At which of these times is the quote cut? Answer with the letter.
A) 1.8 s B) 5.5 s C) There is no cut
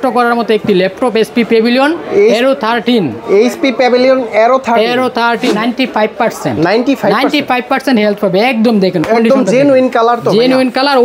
B